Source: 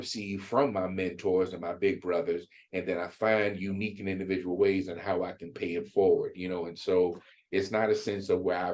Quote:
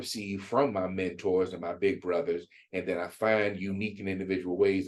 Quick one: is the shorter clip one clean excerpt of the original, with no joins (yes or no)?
yes